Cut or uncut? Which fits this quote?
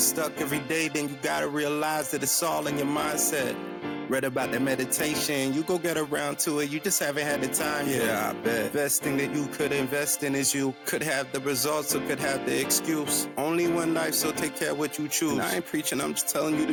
uncut